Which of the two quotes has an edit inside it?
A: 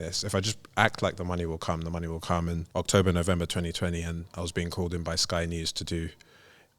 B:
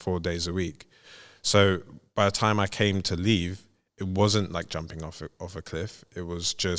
A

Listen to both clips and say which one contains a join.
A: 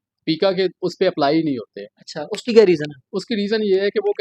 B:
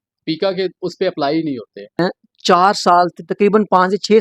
B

